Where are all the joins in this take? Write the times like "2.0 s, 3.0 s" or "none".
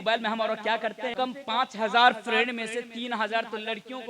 1.1 s